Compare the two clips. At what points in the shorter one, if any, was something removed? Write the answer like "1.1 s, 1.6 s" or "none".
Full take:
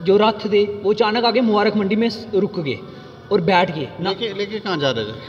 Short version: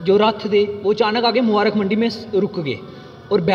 none